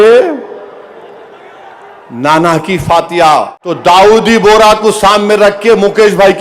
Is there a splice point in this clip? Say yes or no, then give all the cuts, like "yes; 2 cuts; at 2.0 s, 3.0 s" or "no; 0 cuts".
yes; 1 cut; at 3.6 s